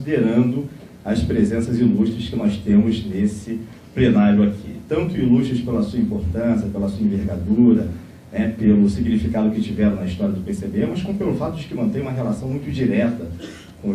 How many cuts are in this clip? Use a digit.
1